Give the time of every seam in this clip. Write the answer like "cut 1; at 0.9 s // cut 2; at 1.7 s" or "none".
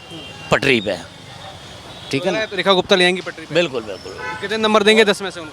none